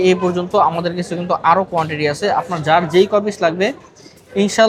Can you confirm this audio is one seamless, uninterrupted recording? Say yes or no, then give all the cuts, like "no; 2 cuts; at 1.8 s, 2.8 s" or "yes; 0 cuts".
yes; 0 cuts